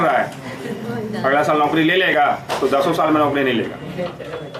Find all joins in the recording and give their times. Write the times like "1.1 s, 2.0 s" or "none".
none